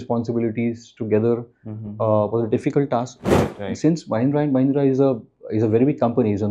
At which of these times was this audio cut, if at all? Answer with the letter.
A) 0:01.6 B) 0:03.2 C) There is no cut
B